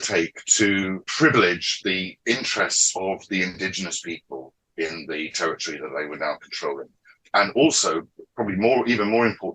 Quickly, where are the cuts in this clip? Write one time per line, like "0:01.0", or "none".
0:01.1
0:01.7